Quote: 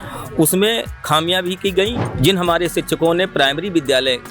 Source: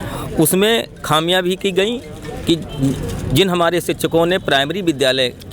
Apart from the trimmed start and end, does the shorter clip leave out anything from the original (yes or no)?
yes